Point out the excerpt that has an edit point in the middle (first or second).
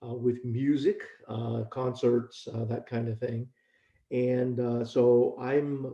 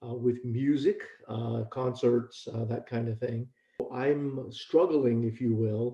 second